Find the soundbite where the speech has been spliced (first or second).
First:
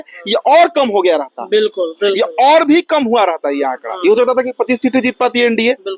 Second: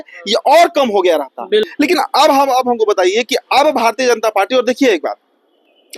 second